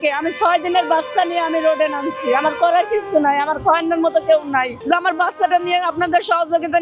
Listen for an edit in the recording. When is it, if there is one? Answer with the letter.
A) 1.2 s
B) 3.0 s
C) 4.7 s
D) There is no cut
C